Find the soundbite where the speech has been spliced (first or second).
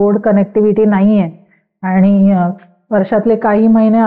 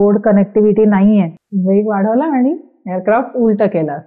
second